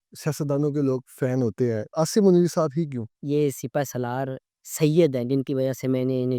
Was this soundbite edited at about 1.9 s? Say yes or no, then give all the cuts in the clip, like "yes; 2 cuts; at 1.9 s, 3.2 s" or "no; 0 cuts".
yes; 2 cuts; at 1.9 s, 3.1 s